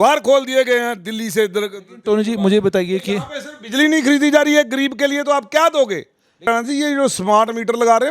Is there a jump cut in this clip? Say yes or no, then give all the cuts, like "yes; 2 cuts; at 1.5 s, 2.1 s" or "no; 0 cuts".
yes; 1 cut; at 6.5 s